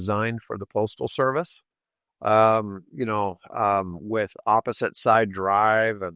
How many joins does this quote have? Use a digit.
0